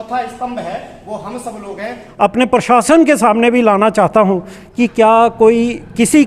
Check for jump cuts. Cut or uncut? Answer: cut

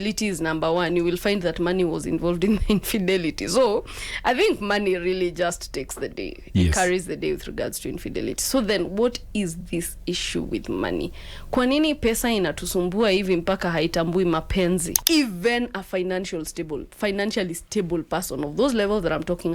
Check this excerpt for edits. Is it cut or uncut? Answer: cut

